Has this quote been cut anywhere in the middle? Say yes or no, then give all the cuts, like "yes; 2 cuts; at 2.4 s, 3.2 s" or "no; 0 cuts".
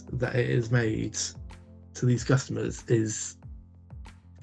no; 0 cuts